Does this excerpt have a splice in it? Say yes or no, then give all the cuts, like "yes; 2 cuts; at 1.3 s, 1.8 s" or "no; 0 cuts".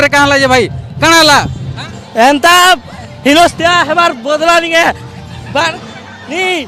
no; 0 cuts